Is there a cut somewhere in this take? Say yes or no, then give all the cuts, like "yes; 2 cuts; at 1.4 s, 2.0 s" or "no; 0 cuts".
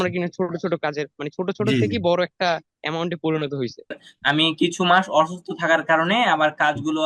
yes; 1 cut; at 4.1 s